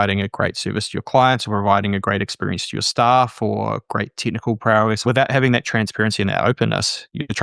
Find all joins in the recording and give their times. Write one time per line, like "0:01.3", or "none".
0:05.0